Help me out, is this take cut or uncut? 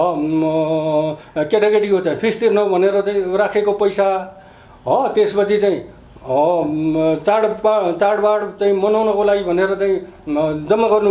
uncut